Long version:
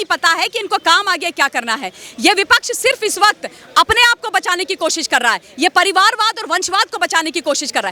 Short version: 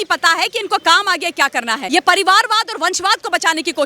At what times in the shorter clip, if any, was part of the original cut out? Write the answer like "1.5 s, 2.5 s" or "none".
1.8 s